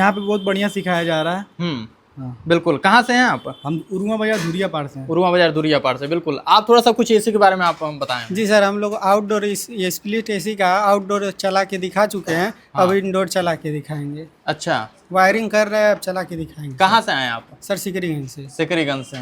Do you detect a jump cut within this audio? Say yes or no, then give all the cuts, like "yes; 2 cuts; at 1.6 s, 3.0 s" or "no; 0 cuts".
no; 0 cuts